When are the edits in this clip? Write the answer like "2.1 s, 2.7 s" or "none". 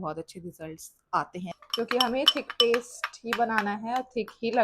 1.5 s